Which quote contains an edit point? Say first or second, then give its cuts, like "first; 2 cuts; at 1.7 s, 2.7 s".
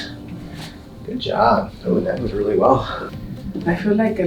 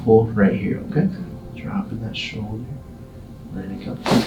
first; 1 cut; at 3.0 s